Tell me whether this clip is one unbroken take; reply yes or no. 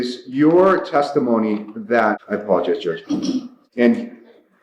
yes